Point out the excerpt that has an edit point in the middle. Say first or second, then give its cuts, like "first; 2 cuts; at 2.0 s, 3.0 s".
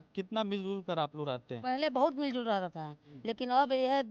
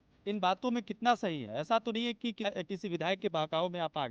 second; 1 cut; at 2.5 s